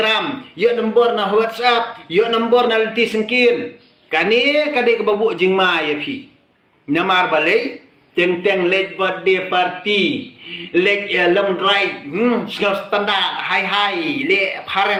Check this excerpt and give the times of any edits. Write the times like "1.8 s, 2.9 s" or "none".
none